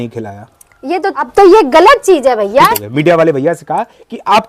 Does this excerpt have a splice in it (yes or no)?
yes